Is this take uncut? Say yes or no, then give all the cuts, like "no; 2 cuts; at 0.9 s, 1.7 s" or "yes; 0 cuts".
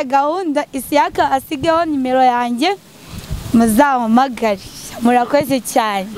yes; 0 cuts